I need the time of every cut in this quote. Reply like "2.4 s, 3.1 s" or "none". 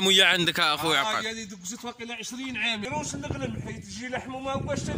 2.8 s